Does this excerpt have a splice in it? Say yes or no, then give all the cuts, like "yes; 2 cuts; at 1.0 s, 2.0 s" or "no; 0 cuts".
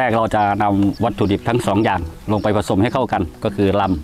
yes; 1 cut; at 1.0 s